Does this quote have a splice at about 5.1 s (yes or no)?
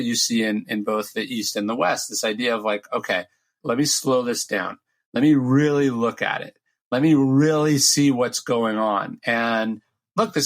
no